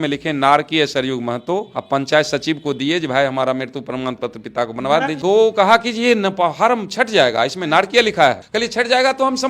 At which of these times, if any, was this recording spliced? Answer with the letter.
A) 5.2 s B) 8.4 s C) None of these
A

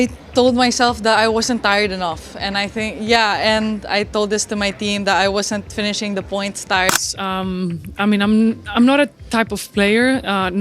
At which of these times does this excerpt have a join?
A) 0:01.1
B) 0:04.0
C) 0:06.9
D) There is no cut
C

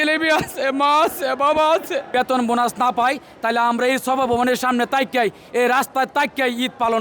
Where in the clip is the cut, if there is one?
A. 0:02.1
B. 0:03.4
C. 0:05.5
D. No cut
A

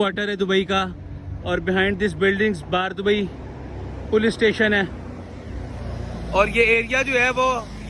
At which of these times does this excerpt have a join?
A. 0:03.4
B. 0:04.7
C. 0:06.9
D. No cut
D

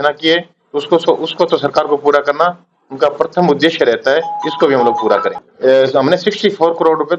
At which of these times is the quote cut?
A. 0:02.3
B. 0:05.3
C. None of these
B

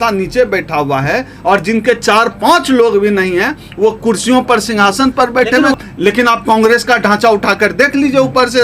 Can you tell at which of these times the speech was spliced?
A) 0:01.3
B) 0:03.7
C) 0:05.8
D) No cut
C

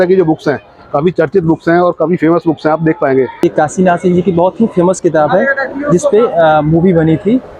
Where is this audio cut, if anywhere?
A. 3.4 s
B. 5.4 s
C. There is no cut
A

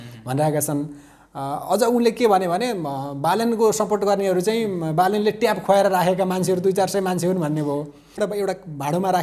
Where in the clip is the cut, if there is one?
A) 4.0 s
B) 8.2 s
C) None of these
B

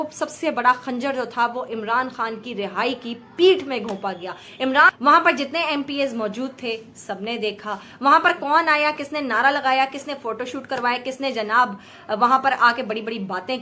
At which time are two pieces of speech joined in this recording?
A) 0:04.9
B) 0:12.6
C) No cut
A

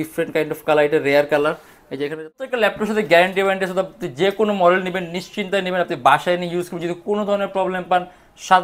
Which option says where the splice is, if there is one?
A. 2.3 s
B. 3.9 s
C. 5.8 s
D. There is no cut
A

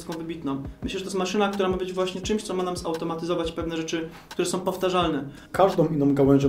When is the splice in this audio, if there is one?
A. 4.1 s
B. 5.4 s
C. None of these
B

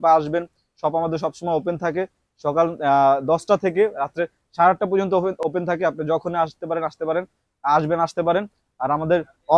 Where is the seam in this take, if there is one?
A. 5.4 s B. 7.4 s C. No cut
C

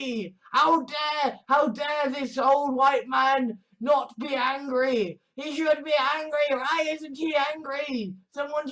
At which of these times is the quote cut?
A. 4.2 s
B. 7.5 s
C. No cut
C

